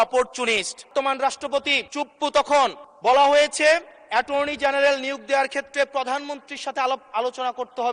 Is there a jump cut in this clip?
yes; 4 cuts; at 0.9 s, 1.8 s, 2.9 s, 4.0 s

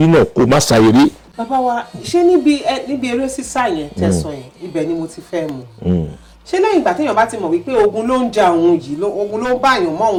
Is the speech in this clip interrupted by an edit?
no; 0 cuts

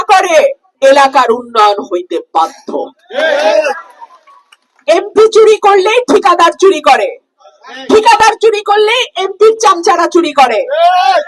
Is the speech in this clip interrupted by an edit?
no; 0 cuts

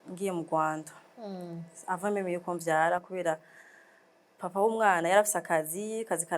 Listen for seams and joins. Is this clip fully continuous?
yes; 0 cuts

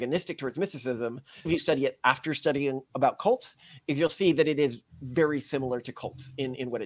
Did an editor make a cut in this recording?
yes; 1 cut; at 1.5 s

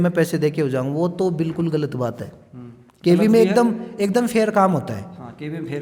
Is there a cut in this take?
no; 0 cuts

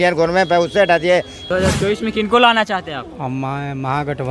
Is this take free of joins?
no; 1 cut; at 1.4 s

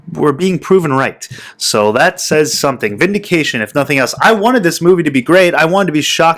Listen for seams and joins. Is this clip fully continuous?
yes; 0 cuts

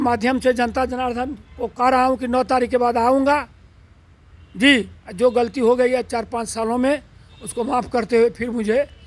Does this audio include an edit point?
no; 0 cuts

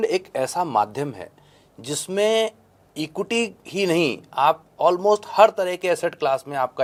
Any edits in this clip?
no; 0 cuts

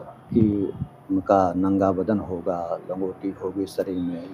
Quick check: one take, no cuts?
yes; 0 cuts

